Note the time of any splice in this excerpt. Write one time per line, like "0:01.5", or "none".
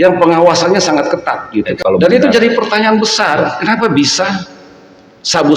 0:01.4

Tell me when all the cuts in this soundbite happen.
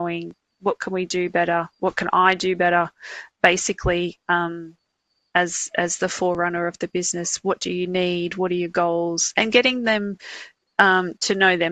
none

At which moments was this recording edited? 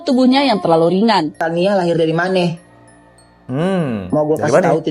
0:01.4

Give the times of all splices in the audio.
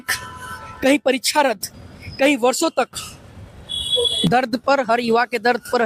0:04.3

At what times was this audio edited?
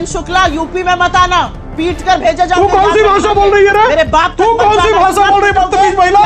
none

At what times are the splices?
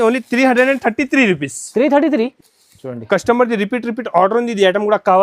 0:02.3

